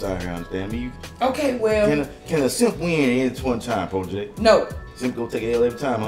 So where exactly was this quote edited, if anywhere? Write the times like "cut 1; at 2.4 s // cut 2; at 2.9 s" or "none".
cut 1; at 1.0 s // cut 2; at 4.9 s